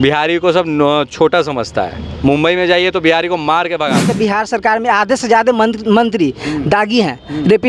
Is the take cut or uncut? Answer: cut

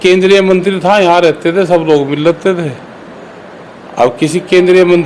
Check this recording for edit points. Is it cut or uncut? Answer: uncut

